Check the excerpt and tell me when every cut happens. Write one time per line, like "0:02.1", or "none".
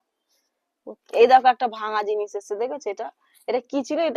0:01.0